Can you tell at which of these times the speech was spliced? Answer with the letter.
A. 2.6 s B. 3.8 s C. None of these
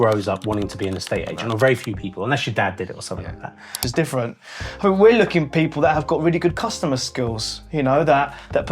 B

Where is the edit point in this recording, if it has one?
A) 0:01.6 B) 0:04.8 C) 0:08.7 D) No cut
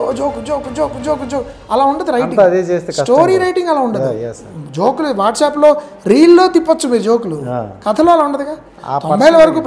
C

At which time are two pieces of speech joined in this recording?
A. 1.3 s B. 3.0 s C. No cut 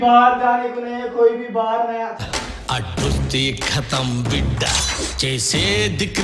C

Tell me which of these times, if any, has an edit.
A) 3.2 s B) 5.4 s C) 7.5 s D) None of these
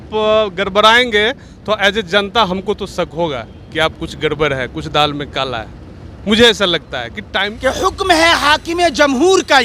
C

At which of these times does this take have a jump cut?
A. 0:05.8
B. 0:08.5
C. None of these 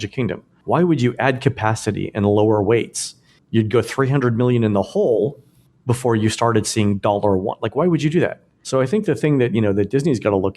C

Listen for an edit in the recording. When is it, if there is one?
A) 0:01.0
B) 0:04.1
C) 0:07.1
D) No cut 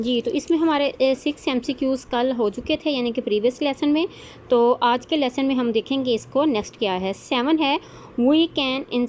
D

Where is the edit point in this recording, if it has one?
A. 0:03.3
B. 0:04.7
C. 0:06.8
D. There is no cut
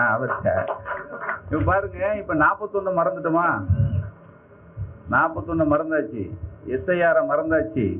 D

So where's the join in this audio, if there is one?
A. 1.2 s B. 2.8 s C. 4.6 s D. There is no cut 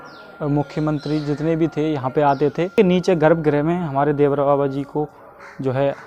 B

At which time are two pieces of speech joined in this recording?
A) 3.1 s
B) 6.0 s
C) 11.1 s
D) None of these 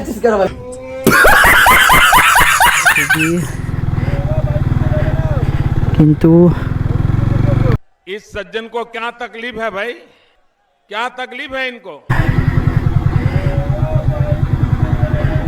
A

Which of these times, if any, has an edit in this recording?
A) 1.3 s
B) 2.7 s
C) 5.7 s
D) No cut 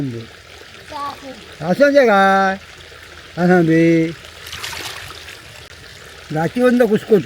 C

